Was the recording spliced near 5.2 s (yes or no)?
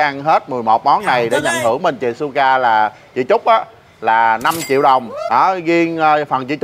yes